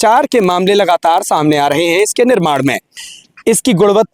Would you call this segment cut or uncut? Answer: cut